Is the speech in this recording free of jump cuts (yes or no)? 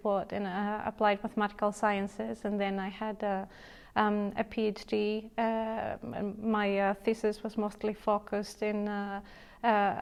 yes